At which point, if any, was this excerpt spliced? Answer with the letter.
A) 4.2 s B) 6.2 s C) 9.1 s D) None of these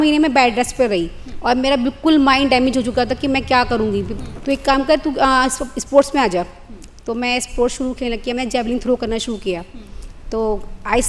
A